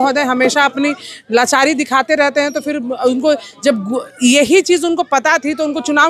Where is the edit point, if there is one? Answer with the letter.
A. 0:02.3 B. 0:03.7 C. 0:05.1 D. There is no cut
D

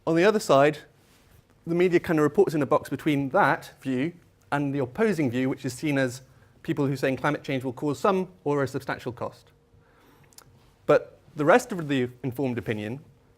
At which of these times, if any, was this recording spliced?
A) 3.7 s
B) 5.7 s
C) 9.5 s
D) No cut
B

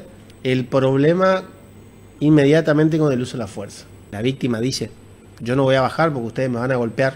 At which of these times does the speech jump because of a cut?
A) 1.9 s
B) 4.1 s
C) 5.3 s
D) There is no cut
B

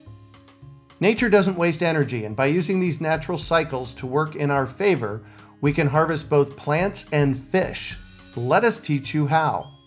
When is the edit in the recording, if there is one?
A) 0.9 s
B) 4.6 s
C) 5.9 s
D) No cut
A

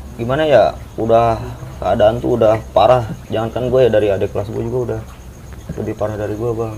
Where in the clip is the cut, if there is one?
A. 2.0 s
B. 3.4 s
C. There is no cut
C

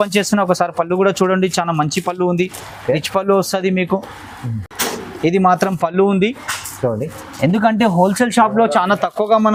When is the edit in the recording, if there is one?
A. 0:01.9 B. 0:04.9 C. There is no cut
C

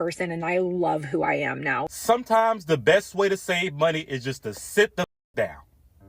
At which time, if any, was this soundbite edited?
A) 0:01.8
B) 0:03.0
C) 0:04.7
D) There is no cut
A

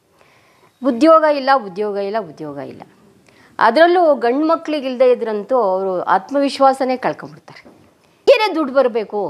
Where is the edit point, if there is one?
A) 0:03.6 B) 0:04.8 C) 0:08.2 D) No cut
C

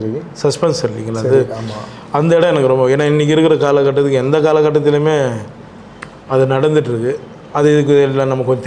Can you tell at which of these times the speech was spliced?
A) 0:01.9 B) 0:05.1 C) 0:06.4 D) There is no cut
D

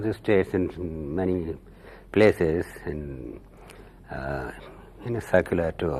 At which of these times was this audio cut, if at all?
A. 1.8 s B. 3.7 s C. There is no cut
B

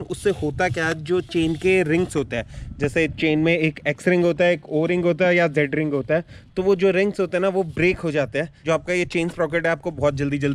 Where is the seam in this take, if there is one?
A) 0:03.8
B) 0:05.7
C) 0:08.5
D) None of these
C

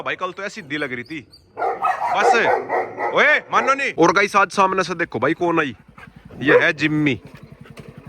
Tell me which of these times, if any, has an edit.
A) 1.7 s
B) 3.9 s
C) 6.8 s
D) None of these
B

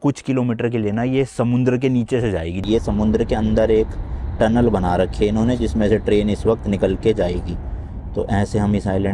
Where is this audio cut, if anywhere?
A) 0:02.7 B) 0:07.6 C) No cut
A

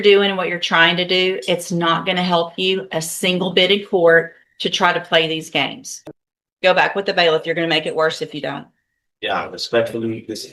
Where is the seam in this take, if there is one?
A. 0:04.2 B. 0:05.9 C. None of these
B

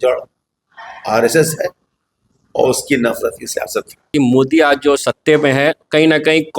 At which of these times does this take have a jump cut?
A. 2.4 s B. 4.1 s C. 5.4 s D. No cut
B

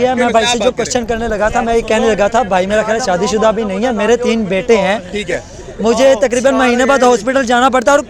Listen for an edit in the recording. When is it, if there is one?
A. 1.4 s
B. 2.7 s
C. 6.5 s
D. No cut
D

